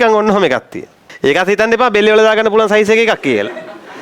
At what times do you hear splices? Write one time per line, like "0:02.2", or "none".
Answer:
0:01.0